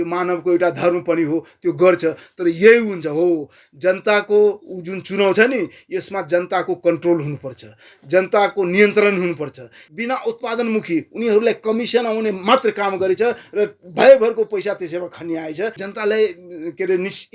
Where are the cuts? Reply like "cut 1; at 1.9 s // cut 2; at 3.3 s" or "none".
cut 1; at 9.8 s // cut 2; at 15.9 s